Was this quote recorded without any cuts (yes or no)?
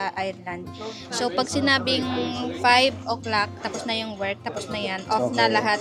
yes